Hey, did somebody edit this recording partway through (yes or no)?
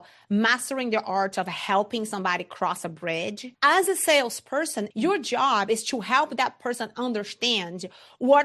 yes